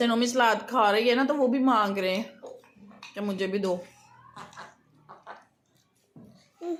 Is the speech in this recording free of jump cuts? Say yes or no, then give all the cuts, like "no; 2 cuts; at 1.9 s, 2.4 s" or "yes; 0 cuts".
yes; 0 cuts